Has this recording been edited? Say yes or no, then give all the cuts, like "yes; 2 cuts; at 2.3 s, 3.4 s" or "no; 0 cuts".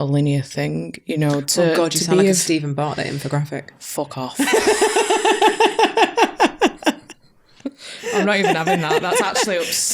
no; 0 cuts